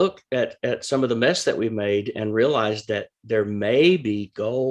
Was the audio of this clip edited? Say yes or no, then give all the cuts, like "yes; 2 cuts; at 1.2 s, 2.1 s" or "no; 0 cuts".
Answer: no; 0 cuts